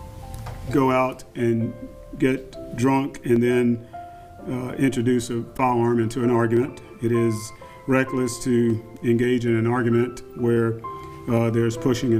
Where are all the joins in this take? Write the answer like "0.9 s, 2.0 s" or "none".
none